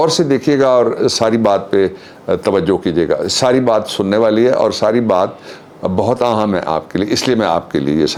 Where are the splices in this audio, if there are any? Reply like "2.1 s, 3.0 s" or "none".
none